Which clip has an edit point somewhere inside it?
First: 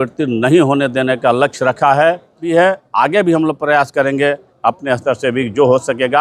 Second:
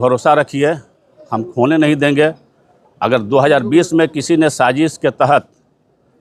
first; 1 cut; at 2.5 s

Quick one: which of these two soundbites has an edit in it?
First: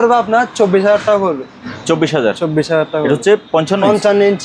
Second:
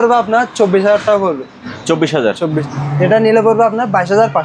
second; 1 cut; at 2.6 s

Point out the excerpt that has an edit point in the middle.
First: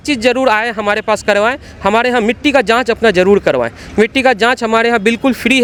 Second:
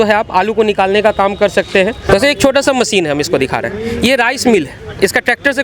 second; 1 cut; at 2.0 s

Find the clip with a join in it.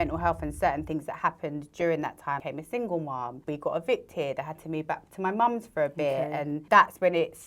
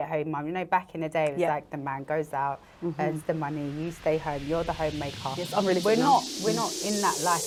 first; 3 cuts; at 2.4 s, 3.4 s, 6.6 s

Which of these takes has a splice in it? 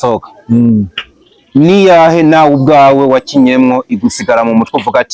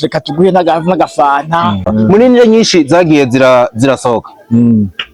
second; 1 cut; at 1.9 s

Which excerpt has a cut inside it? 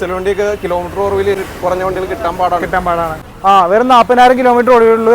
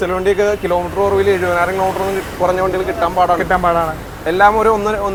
first; 2 cuts; at 1.4 s, 3.3 s

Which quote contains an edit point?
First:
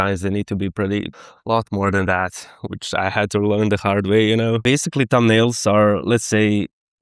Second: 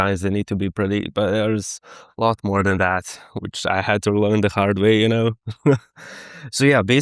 first; 2 cuts; at 1.1 s, 4.6 s

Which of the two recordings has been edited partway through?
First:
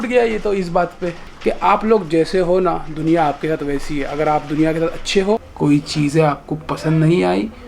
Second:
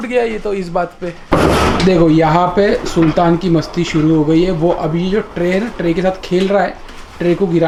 first; 2 cuts; at 1.2 s, 5.5 s

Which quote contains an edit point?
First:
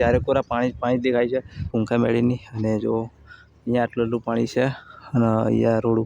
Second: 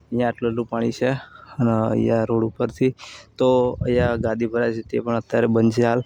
first; 1 cut; at 1.7 s

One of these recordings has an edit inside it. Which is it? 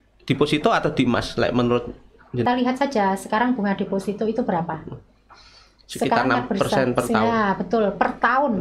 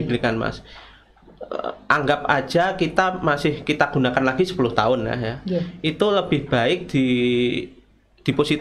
first; 1 cut; at 2.4 s

